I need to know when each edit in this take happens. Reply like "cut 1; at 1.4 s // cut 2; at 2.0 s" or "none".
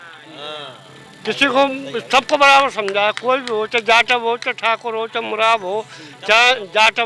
none